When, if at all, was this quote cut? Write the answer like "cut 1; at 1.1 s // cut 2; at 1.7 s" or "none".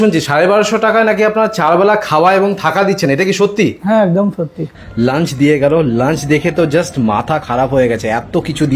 cut 1; at 4.7 s